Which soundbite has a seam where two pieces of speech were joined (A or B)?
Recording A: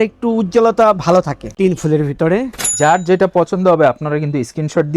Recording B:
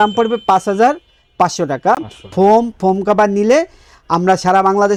A